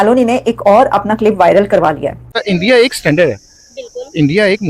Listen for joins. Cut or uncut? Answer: cut